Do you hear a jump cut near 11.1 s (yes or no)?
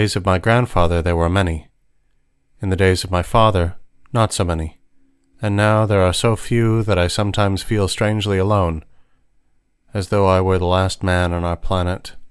yes